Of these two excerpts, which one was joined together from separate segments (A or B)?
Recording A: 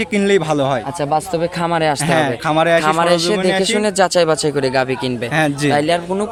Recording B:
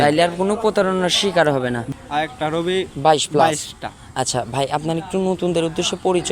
B